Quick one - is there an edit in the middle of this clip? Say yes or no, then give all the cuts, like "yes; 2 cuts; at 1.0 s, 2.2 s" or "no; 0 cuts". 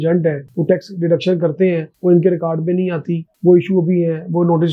no; 0 cuts